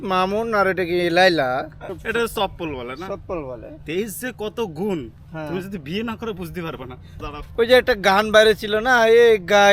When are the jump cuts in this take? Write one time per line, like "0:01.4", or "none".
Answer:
0:01.8
0:07.1